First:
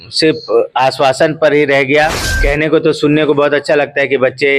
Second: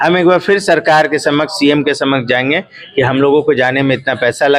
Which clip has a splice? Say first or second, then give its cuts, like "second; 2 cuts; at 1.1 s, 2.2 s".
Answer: first; 1 cut; at 2.3 s